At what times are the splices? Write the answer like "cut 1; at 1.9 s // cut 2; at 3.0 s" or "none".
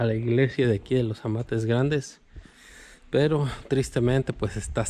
none